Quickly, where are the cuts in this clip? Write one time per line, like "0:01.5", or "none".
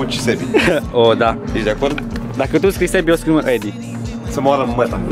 none